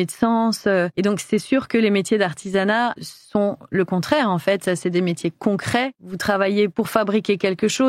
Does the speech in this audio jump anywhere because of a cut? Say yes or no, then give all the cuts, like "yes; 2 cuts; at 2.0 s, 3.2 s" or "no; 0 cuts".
yes; 2 cuts; at 0.9 s, 6.0 s